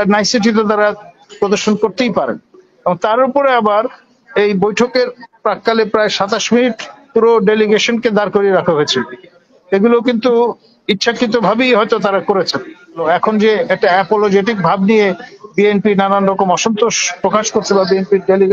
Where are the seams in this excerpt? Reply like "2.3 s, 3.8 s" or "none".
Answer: 13.0 s